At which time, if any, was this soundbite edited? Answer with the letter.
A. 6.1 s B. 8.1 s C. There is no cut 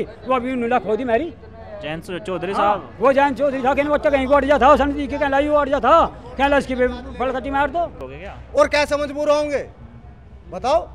B